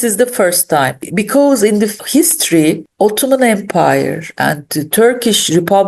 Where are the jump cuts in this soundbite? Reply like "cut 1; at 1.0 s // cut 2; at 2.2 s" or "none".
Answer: cut 1; at 1.0 s // cut 2; at 2.0 s // cut 3; at 2.9 s